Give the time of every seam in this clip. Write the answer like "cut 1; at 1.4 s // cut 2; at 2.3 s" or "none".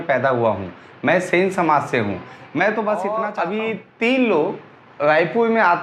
cut 1; at 3.3 s